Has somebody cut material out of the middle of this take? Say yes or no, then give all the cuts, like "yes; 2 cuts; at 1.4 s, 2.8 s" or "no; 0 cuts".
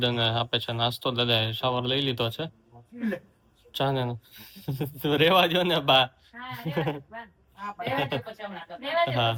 no; 0 cuts